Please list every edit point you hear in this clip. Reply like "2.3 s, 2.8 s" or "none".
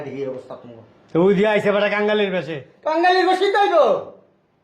none